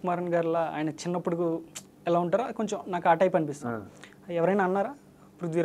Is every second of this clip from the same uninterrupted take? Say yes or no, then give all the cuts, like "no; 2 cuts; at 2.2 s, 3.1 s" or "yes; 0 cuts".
yes; 0 cuts